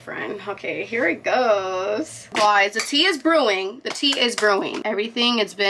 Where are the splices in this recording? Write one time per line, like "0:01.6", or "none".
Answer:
0:02.2
0:04.8